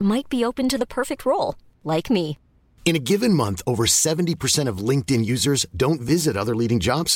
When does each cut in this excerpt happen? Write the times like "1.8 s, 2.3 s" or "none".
none